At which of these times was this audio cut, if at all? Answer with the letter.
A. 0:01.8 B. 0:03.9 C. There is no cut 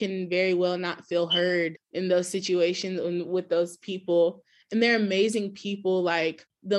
A